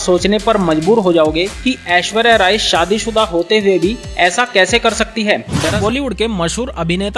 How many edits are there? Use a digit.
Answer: 1